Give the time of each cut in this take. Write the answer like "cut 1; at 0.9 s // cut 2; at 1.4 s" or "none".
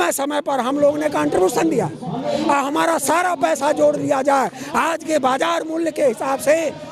none